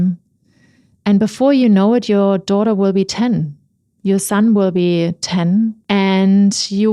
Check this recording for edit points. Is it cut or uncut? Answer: cut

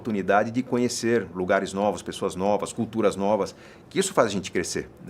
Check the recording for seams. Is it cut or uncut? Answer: uncut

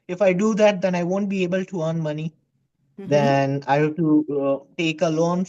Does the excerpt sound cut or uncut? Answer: uncut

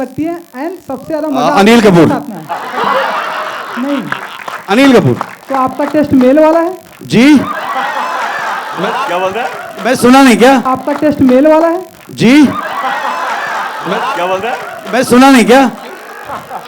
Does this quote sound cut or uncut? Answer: cut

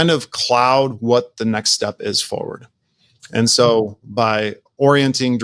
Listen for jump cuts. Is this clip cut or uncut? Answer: uncut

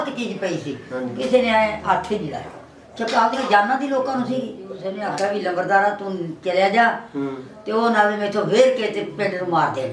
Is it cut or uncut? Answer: cut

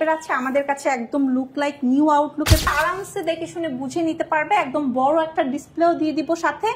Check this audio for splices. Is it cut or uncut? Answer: cut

